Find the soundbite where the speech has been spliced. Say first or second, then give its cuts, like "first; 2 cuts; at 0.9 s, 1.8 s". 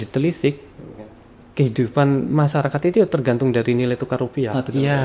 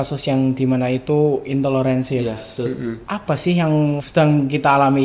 second; 2 cuts; at 2.9 s, 4.0 s